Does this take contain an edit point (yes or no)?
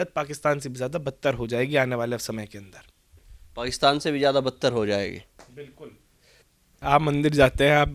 yes